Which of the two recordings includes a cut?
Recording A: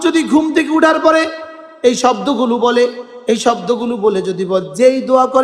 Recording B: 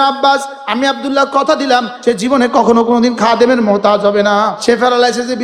B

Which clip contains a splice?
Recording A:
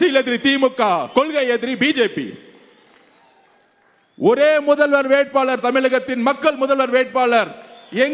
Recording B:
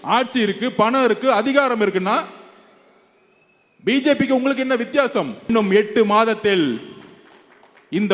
B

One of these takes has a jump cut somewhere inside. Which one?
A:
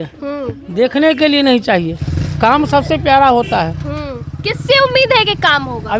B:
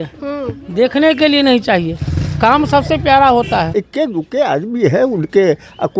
B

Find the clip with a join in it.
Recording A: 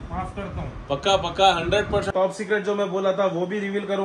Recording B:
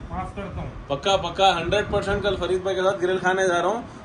A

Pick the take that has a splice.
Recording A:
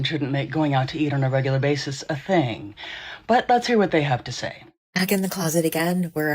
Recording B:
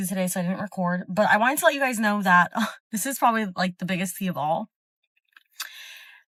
A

